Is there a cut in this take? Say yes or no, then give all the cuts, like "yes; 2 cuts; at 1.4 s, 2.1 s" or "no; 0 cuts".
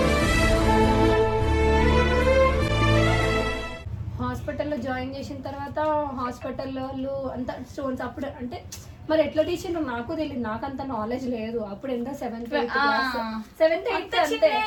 no; 0 cuts